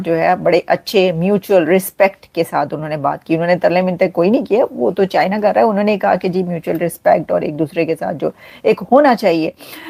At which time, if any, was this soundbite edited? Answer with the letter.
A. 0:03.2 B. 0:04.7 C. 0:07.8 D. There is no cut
D